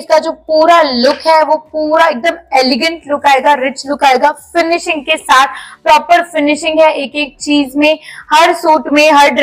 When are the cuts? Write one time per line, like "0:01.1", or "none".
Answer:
none